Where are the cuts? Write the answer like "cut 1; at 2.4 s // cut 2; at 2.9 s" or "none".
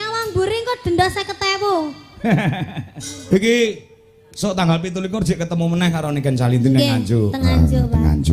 cut 1; at 2.8 s